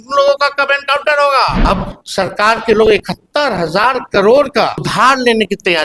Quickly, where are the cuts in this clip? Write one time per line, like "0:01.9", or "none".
0:01.6
0:04.9